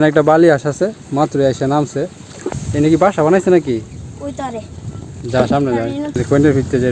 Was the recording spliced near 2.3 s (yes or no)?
yes